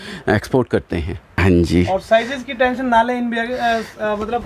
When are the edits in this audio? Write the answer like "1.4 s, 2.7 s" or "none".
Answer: 1.3 s